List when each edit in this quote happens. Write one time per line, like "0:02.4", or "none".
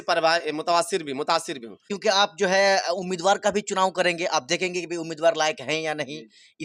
0:01.8